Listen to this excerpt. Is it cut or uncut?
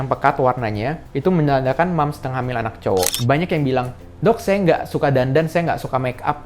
cut